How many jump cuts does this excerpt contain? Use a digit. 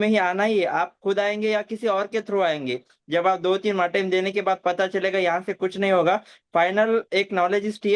0